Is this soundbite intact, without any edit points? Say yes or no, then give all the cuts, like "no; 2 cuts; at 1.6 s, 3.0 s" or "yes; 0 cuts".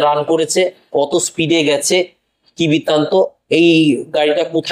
yes; 0 cuts